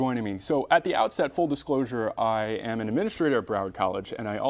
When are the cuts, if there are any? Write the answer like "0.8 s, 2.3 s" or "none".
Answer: 3.0 s